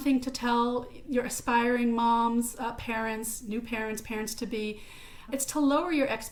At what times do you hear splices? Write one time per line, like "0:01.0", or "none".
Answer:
none